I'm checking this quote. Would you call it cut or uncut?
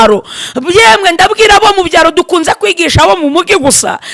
uncut